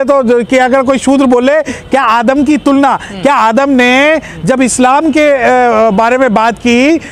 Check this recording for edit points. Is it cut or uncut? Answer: uncut